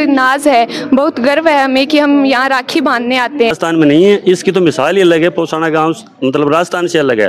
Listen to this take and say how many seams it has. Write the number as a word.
one